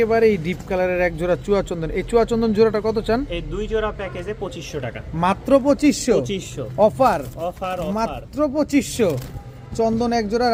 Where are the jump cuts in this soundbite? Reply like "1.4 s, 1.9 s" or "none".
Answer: none